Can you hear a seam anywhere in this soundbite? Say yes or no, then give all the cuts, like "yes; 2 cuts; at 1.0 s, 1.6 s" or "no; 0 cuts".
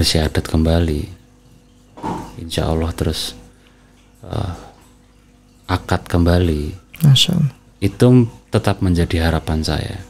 yes; 1 cut; at 7.6 s